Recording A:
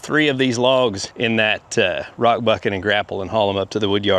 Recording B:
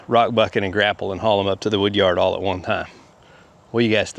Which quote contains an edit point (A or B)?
A